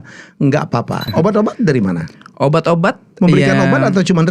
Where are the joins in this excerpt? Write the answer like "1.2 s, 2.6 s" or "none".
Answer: 1.1 s